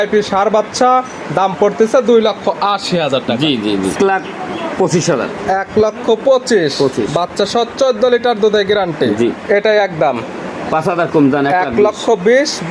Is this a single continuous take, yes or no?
no